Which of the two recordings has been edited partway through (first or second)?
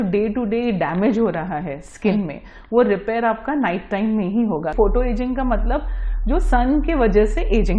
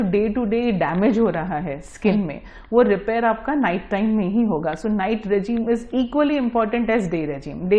first